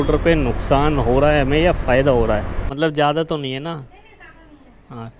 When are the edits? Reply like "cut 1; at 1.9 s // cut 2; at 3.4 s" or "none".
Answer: cut 1; at 2.6 s